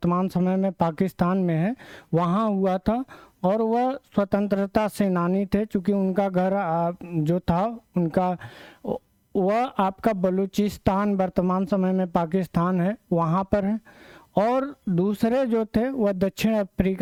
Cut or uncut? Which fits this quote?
uncut